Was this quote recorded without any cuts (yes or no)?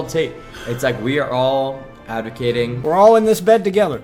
yes